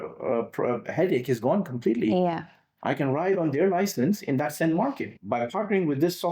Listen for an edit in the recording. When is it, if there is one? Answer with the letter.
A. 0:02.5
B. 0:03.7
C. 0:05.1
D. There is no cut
C